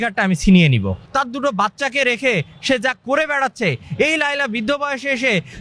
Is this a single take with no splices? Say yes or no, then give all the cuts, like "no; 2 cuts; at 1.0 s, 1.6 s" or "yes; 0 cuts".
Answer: no; 1 cut; at 1.0 s